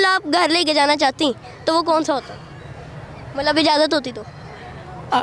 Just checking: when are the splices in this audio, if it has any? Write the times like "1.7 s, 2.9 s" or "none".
none